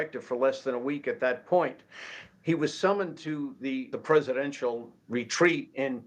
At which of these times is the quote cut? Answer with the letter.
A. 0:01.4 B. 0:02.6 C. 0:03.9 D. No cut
C